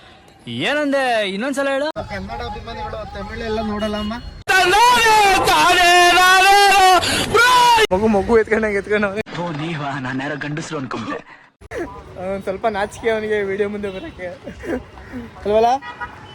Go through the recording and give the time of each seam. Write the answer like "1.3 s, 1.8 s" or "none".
7.9 s